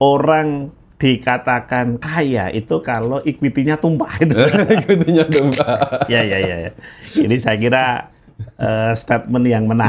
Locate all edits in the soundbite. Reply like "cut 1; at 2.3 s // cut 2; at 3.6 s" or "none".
none